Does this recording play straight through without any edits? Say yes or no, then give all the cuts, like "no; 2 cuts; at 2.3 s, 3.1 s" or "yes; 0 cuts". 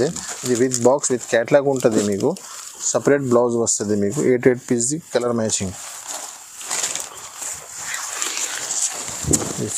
yes; 0 cuts